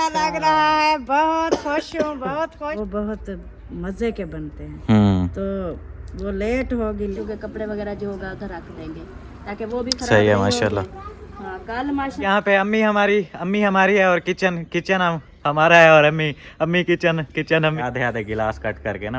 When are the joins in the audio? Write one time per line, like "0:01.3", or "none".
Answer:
0:02.8
0:07.2
0:12.2
0:17.8

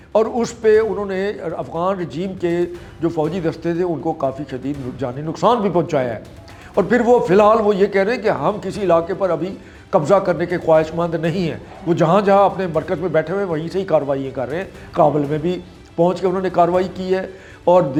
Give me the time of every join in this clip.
none

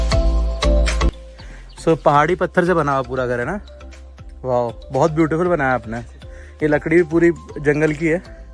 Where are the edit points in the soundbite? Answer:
none

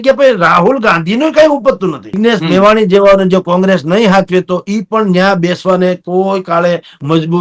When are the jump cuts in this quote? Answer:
0:02.2

